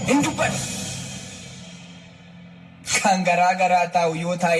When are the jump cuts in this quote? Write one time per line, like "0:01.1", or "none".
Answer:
0:01.5